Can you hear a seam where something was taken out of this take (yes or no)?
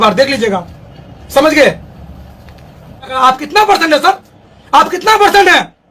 yes